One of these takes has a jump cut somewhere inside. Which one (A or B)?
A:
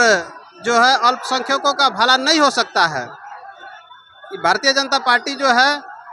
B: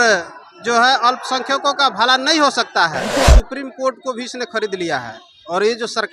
B